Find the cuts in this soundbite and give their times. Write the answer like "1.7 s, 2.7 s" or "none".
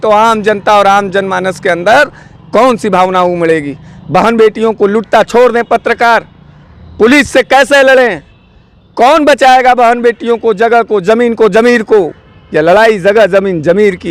none